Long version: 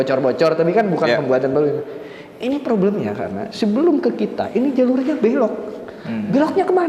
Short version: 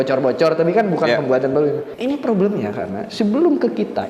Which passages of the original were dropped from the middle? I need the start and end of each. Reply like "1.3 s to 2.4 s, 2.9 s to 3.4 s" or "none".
1.9 s to 2.3 s